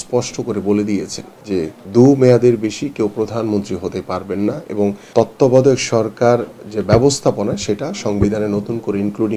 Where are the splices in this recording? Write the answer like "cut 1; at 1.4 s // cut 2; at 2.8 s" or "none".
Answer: cut 1; at 1.7 s // cut 2; at 5.0 s